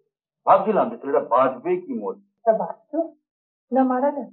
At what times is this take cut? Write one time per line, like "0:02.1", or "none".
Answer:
0:02.3